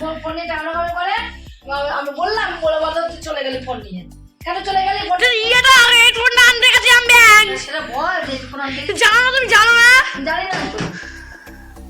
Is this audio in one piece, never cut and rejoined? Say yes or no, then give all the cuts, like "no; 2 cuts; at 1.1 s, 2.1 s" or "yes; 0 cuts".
yes; 0 cuts